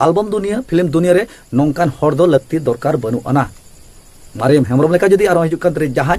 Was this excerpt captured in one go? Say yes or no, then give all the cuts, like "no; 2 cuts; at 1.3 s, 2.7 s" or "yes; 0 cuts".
yes; 0 cuts